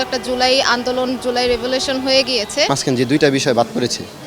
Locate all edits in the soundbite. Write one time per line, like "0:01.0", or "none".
0:02.8